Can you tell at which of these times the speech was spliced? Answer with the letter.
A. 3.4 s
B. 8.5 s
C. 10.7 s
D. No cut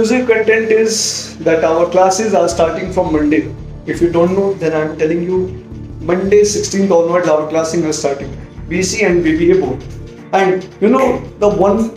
D